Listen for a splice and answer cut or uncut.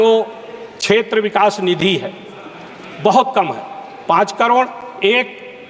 uncut